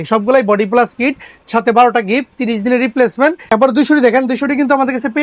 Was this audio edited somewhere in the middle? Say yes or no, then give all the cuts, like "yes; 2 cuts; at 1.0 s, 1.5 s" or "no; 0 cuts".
yes; 1 cut; at 3.4 s